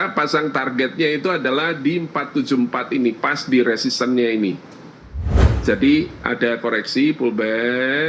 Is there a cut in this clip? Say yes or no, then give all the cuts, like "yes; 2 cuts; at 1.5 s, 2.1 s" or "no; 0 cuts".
yes; 1 cut; at 5.3 s